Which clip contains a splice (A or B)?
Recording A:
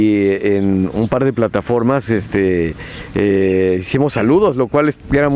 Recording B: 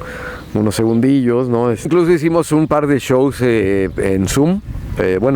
B